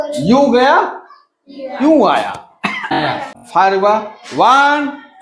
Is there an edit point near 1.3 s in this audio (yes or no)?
no